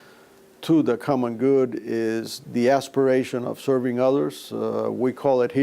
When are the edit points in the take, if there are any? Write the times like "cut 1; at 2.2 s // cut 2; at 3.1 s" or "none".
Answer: cut 1; at 2.3 s